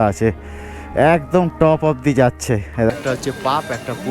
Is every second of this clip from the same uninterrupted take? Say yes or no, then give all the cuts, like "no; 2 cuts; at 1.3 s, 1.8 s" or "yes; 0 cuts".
no; 1 cut; at 2.9 s